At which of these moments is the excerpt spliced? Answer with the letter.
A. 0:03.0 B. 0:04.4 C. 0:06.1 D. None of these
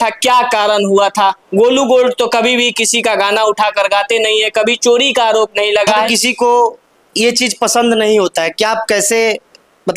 C